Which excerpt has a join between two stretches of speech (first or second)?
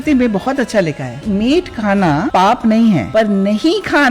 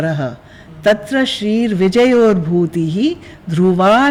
first